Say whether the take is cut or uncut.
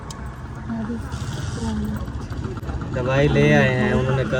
uncut